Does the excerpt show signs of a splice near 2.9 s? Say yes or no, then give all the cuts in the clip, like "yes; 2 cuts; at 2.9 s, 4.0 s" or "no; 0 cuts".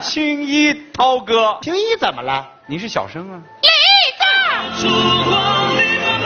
no; 2 cuts; at 1.6 s, 4.7 s